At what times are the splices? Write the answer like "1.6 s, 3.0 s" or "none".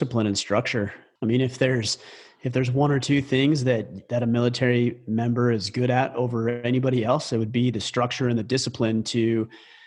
1.0 s